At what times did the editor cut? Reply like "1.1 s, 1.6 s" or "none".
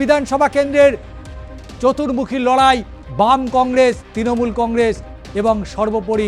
4.1 s